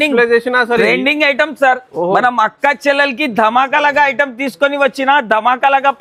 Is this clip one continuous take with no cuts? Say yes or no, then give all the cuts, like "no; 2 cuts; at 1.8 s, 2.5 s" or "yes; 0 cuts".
yes; 0 cuts